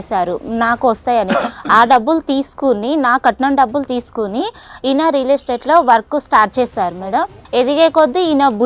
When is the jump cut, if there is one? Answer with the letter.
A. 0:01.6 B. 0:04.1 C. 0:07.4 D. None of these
C